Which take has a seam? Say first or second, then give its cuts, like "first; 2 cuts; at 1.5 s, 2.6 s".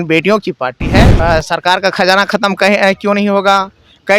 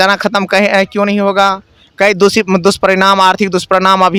first; 1 cut; at 1.1 s